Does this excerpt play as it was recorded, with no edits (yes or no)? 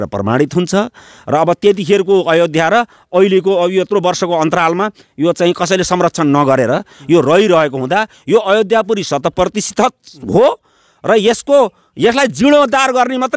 yes